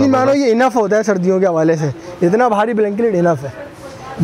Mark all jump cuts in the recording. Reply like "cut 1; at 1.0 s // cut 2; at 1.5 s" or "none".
none